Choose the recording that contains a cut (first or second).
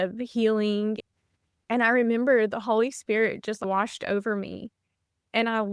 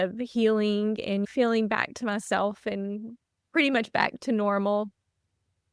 first